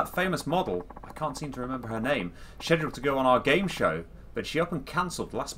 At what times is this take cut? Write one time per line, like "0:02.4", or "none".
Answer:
none

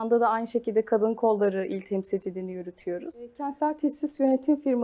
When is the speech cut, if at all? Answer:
0:03.5

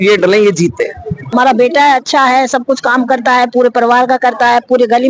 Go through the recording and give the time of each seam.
0:01.3

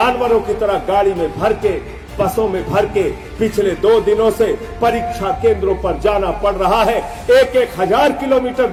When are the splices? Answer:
none

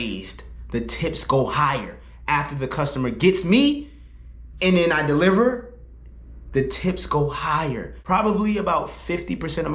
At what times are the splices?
0:07.9

